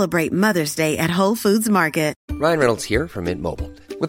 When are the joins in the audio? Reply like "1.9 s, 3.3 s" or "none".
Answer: 2.2 s